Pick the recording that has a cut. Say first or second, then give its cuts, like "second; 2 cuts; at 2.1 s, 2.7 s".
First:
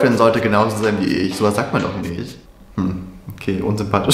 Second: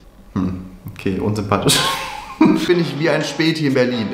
second; 1 cut; at 2.6 s